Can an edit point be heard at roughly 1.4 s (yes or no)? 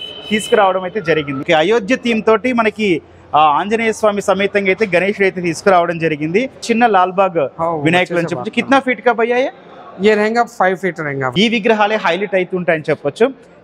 yes